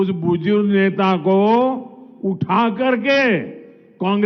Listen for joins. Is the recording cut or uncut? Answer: uncut